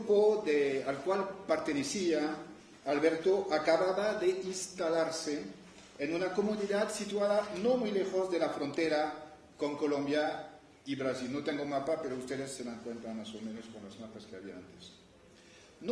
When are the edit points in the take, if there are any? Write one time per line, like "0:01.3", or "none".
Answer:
0:12.8